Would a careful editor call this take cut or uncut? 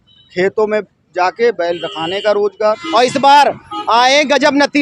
cut